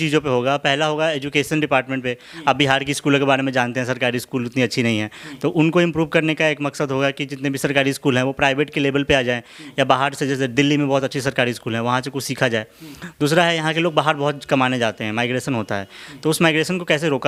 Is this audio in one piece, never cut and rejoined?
yes; 0 cuts

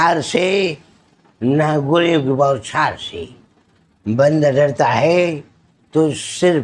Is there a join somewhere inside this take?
no; 0 cuts

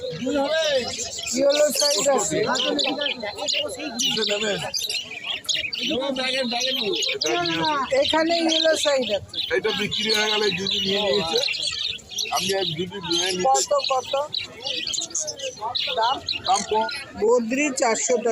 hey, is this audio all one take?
no; 1 cut; at 16.8 s

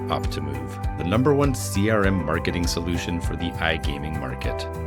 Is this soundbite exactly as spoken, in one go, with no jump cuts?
yes; 0 cuts

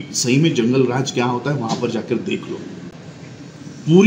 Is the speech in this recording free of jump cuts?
yes; 0 cuts

